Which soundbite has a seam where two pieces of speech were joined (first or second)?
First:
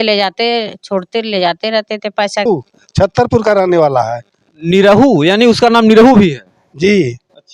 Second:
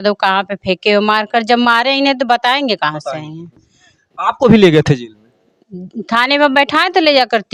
first